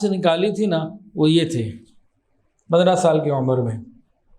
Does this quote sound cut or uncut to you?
uncut